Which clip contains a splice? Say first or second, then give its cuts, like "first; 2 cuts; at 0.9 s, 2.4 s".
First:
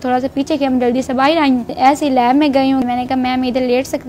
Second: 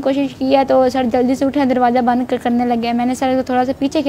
first; 2 cuts; at 1.7 s, 2.8 s